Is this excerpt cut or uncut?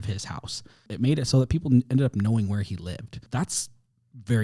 cut